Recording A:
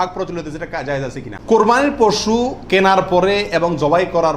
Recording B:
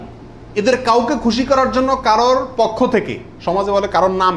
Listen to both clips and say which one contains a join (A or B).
A